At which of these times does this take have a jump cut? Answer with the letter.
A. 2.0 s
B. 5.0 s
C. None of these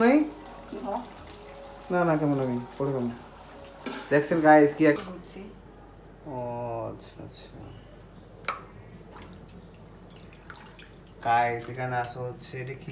B